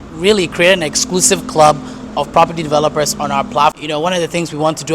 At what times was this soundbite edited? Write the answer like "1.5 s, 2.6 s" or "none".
3.8 s